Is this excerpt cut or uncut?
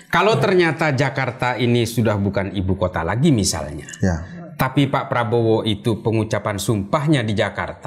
uncut